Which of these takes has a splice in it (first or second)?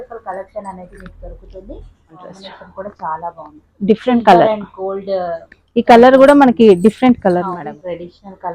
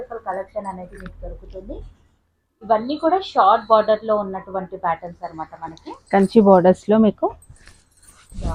first